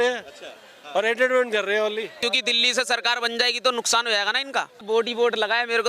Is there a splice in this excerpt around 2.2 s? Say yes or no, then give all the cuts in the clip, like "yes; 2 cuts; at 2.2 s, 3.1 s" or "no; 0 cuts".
yes; 2 cuts; at 2.2 s, 4.8 s